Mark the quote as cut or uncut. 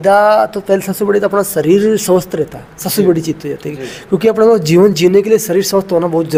uncut